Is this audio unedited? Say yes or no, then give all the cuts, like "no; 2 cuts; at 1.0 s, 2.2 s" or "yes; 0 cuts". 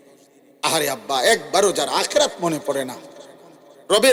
yes; 0 cuts